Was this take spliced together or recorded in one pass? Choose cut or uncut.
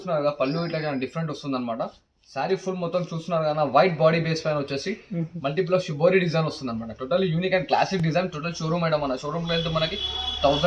uncut